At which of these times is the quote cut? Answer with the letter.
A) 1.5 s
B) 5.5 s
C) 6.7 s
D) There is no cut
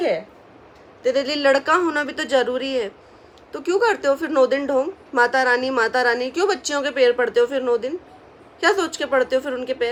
D